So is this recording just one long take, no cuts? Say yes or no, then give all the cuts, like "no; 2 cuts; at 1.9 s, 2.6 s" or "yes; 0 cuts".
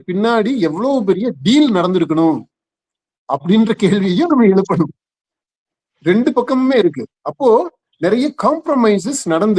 yes; 0 cuts